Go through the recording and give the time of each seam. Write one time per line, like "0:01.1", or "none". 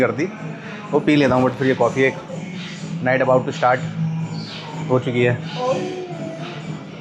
none